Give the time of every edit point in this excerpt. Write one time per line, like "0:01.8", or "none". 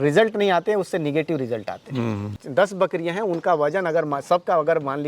0:02.3

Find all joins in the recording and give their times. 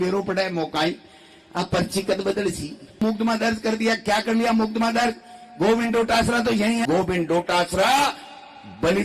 0:03.0
0:06.8

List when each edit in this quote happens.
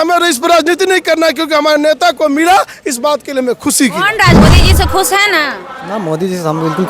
0:04.4

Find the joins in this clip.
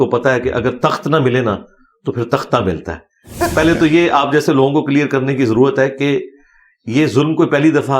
0:03.4

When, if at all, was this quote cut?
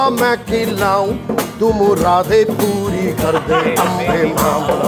none

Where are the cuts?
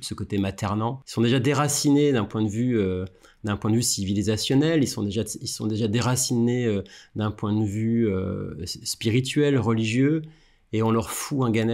0:01.0

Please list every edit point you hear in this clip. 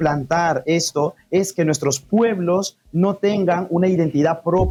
none

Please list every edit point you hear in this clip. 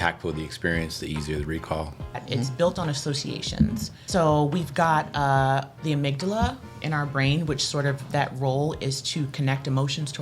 0:02.2
0:04.0

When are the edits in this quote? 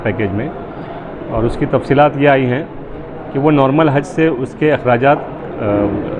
none

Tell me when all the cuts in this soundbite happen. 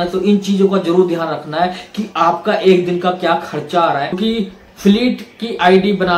0:04.2

